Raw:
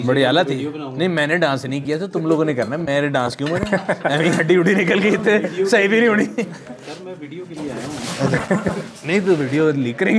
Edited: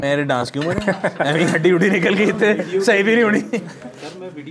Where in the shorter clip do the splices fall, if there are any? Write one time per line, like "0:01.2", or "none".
none